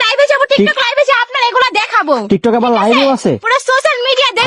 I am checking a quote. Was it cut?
no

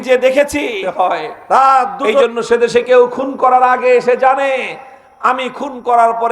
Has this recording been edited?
yes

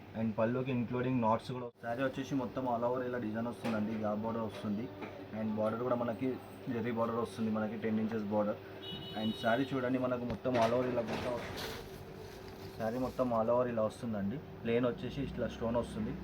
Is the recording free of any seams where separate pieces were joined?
no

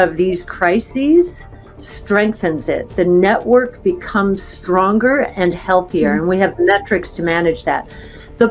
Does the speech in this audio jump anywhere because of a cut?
no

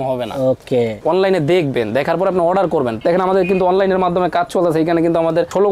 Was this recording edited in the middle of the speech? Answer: yes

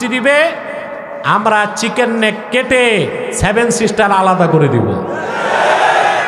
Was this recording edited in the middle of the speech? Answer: no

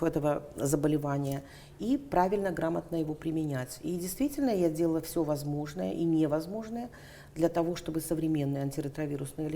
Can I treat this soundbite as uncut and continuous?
yes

